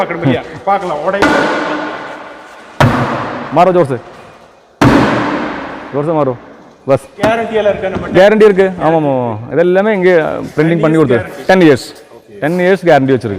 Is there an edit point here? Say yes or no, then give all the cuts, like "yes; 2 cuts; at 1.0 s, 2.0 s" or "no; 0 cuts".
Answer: yes; 1 cut; at 7.1 s